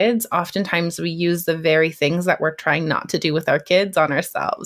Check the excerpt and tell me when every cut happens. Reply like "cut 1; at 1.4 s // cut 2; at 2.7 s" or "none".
none